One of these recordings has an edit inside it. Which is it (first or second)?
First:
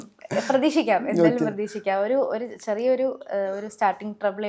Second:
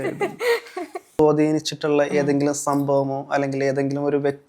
second